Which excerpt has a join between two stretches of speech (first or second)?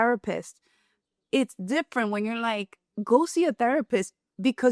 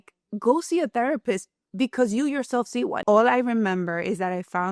second